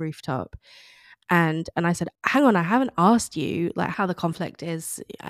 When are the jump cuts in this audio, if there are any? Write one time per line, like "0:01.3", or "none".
0:02.1
0:03.9